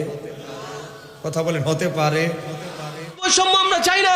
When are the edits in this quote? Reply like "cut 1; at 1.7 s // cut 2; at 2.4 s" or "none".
cut 1; at 3.0 s